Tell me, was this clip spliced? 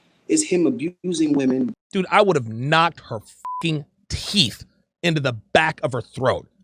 yes; 2 cuts; at 1.0 s, 1.7 s

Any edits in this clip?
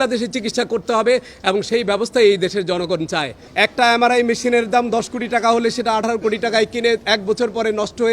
yes; 1 cut; at 3.4 s

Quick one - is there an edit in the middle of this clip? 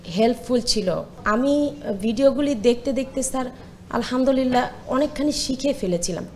yes; 1 cut; at 1.1 s

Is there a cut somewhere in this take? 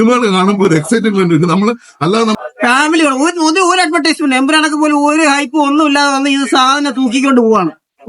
yes; 1 cut; at 2.3 s

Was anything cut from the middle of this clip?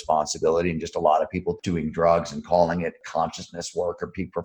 yes; 2 cuts; at 1.6 s, 3.0 s

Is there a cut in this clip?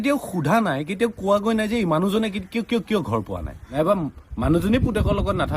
yes; 1 cut; at 3.8 s

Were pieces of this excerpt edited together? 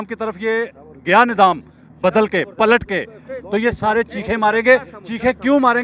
no; 0 cuts

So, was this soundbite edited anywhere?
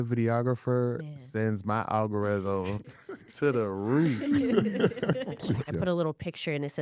yes; 1 cut; at 5.7 s

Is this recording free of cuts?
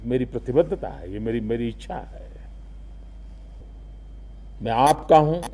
no; 1 cut; at 3.6 s

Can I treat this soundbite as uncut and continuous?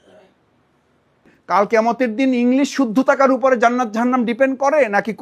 no; 1 cut; at 1.3 s

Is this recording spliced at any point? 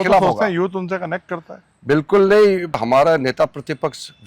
yes; 1 cut; at 2.8 s

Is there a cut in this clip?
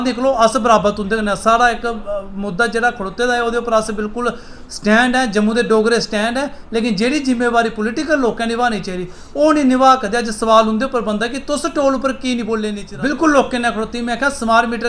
yes; 1 cut; at 12.8 s

